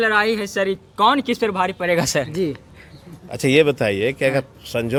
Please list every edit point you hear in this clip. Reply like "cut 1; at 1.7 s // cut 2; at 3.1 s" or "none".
none